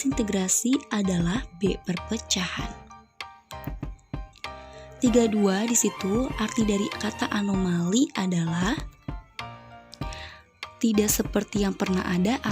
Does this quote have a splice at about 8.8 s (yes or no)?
yes